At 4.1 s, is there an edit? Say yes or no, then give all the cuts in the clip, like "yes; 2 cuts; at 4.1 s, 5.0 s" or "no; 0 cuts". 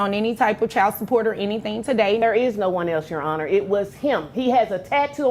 no; 1 cut; at 2.2 s